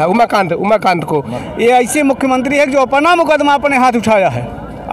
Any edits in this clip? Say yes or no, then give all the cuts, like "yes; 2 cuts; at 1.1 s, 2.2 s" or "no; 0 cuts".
yes; 1 cut; at 1.4 s